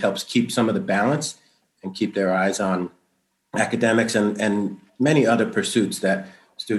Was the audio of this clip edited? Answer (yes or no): no